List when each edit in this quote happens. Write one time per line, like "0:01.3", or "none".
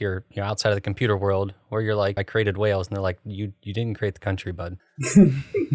0:02.2
0:04.8